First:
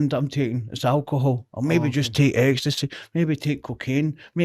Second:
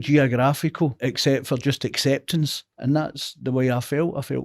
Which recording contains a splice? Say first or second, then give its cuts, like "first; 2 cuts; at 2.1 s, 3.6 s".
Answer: second; 2 cuts; at 1.1 s, 2.6 s